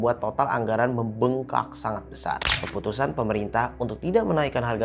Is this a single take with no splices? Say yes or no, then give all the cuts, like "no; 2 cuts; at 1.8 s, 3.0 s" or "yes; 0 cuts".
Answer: no; 1 cut; at 2.5 s